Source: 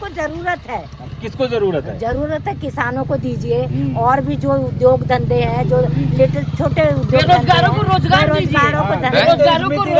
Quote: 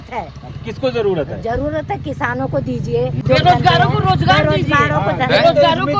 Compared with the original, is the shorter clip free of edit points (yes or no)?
no